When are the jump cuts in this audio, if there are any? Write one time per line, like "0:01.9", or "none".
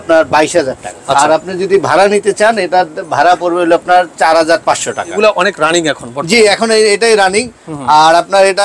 0:00.9
0:05.2